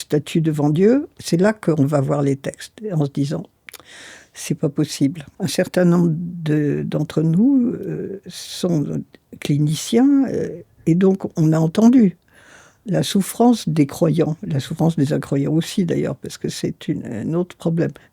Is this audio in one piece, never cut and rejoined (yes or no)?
no